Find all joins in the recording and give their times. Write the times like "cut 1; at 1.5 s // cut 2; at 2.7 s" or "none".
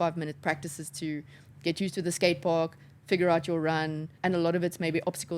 cut 1; at 4.1 s